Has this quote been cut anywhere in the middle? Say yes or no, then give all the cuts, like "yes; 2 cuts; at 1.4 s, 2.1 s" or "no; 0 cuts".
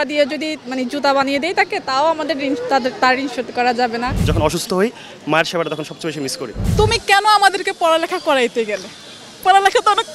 yes; 2 cuts; at 4.3 s, 6.6 s